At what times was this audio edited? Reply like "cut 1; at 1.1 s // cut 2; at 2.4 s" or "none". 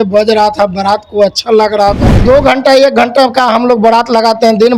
cut 1; at 2.2 s